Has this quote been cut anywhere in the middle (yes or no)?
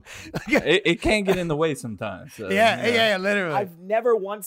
yes